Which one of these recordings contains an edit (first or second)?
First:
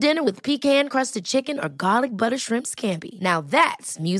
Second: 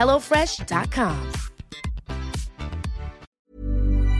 second